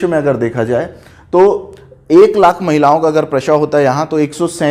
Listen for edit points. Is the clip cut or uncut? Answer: uncut